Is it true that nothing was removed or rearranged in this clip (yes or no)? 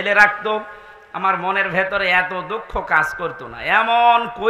yes